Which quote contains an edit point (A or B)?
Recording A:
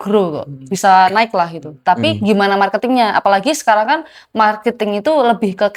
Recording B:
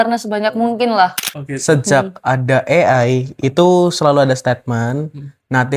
B